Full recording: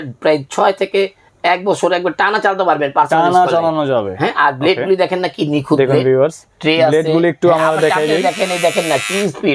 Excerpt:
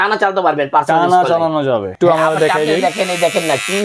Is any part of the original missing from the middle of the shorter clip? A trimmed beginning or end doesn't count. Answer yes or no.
yes